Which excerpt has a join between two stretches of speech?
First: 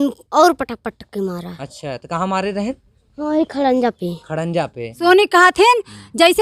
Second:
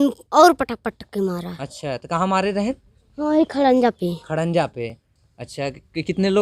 first; 1 cut; at 4.9 s

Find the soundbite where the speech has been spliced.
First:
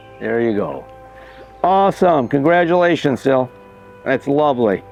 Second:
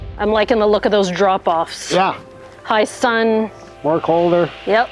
second; 1 cut; at 3.6 s

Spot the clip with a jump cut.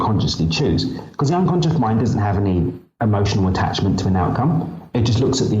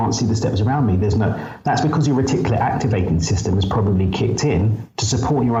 first; 1 cut; at 2.8 s

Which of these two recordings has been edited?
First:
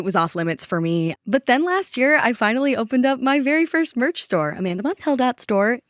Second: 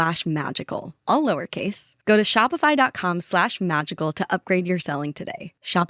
first; 1 cut; at 1.2 s

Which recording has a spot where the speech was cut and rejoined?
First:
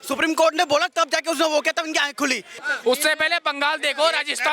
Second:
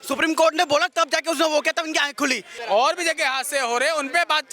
second; 1 cut; at 2.5 s

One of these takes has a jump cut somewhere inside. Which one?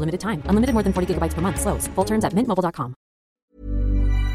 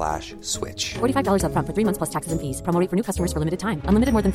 first; 1 cut; at 3.4 s

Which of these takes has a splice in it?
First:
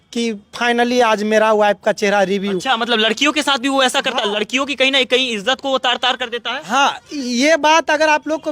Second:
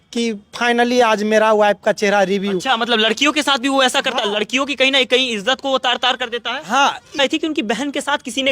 second; 1 cut; at 7.2 s

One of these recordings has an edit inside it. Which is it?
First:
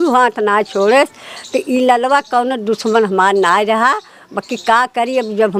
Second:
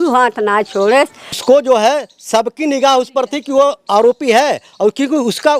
second; 1 cut; at 1.4 s

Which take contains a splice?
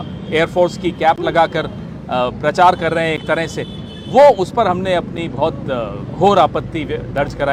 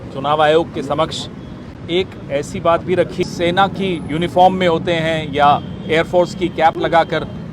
second; 1 cut; at 3.3 s

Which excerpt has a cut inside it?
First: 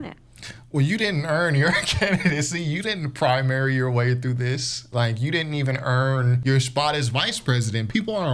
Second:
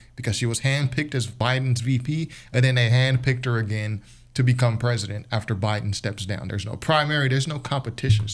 first; 1 cut; at 6.4 s

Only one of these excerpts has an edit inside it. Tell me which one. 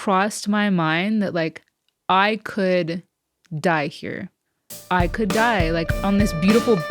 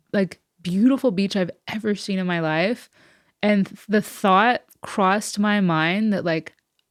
first; 1 cut; at 6.0 s

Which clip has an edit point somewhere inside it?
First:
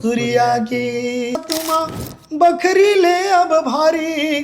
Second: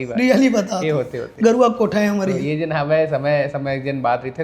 first; 1 cut; at 1.4 s

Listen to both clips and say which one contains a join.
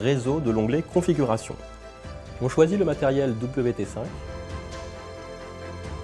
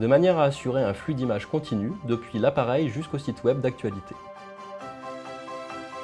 second; 1 cut; at 2.5 s

